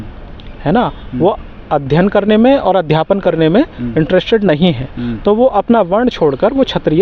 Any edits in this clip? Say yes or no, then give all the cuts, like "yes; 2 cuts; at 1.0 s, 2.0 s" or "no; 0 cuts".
no; 0 cuts